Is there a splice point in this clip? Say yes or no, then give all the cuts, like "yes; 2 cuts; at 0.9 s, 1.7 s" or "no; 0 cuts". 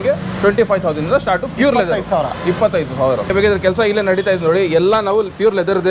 yes; 1 cut; at 3.3 s